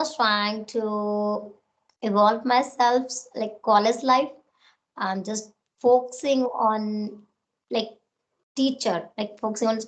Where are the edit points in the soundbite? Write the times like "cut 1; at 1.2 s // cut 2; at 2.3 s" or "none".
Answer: none